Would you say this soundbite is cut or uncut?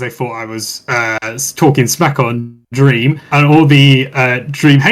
uncut